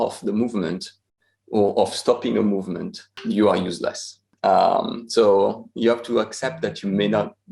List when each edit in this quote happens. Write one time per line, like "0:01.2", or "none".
0:03.2